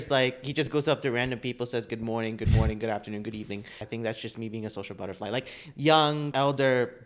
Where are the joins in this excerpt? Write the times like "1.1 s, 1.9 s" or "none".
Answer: 3.8 s, 6.3 s